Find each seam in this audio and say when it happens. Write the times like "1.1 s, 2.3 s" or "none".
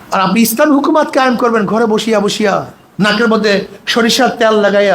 2.8 s